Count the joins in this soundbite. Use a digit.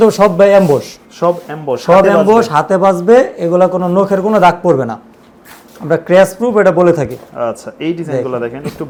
0